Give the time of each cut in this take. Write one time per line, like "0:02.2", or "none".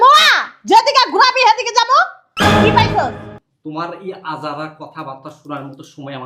0:03.3

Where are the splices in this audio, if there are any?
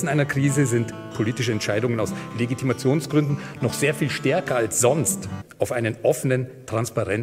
none

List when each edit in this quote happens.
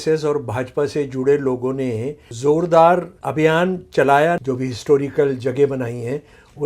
0:02.3
0:03.2
0:04.4

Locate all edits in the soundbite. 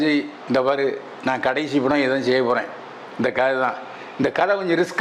none

